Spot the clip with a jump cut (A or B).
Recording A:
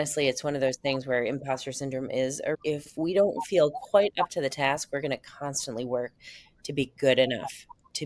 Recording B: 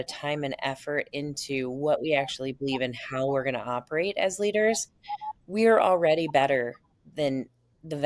A